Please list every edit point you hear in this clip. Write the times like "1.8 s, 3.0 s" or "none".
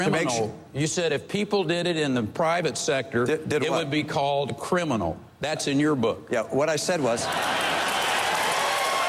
none